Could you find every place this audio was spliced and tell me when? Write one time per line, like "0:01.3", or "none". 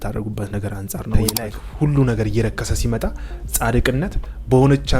0:01.2